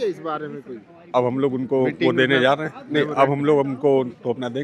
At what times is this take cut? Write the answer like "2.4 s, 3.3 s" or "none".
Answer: none